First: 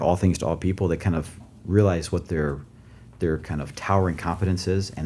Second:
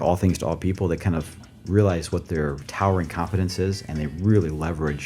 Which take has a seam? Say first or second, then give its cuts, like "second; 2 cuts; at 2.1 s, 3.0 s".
second; 1 cut; at 2.6 s